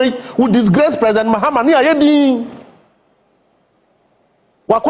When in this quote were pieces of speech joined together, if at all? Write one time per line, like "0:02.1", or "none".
none